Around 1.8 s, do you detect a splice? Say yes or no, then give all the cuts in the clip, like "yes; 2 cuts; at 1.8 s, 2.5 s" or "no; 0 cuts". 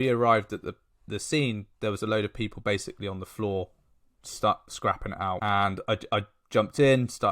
no; 1 cut; at 5.4 s